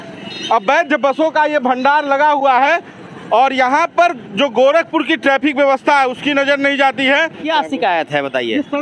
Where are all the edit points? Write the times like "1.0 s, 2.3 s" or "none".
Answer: 7.4 s